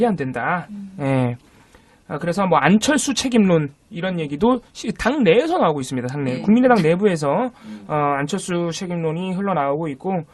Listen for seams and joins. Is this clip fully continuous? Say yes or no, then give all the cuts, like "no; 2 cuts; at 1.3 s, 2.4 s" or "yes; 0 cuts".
no; 1 cut; at 5.3 s